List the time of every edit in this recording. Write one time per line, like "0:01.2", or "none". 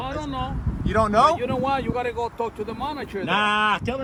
none